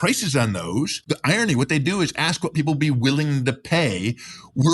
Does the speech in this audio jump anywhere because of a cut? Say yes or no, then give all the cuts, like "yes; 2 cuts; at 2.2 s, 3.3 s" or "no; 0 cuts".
yes; 1 cut; at 1.0 s